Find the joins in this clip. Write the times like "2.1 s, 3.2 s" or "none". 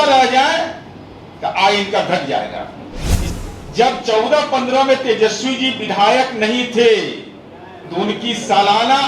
3.2 s